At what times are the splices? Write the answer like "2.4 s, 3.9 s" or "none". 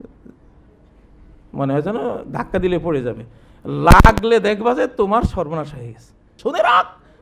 6.3 s